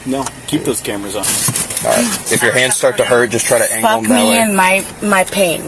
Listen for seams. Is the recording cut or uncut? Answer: cut